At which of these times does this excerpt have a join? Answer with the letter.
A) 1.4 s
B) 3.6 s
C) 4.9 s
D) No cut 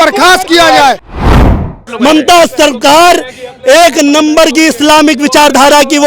A